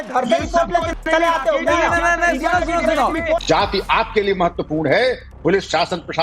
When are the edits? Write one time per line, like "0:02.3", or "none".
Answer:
0:02.1
0:03.4